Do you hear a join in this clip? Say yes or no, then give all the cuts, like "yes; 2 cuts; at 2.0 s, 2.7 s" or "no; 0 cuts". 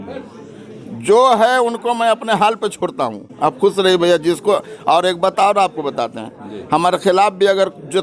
no; 0 cuts